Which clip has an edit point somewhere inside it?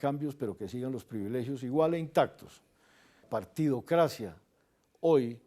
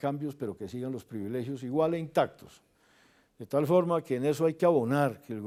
first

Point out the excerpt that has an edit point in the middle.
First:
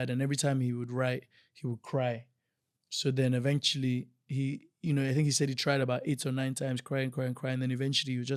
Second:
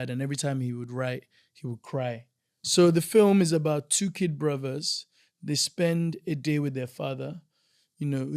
second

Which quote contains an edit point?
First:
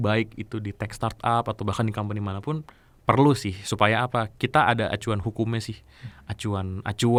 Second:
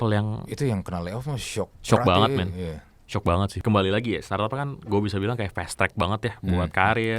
second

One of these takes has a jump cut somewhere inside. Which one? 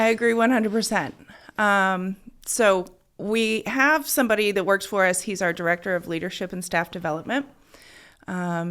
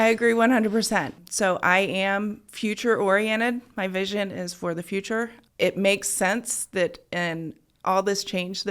second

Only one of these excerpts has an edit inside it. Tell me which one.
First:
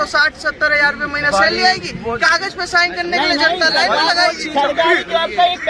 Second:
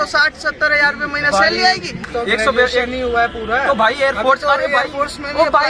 second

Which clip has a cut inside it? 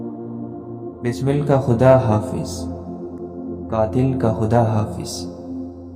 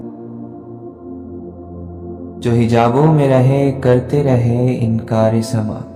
first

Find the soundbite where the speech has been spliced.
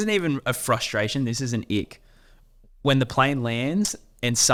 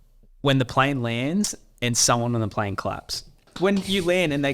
second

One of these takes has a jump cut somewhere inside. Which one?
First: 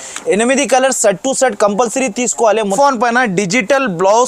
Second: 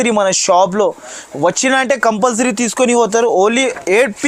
first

